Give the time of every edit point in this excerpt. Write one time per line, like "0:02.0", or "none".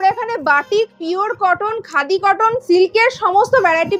none